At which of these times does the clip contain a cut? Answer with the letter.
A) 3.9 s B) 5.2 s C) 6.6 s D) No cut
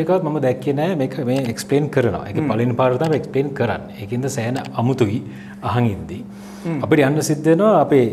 D